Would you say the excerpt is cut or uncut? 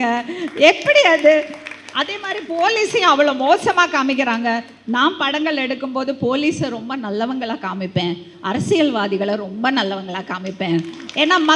uncut